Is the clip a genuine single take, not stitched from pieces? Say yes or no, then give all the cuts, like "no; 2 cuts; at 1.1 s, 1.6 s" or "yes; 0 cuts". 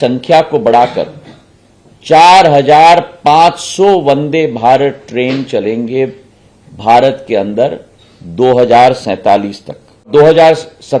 no; 1 cut; at 10.1 s